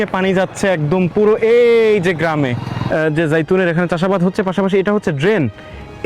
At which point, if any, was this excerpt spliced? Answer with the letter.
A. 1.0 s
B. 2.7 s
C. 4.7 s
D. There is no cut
B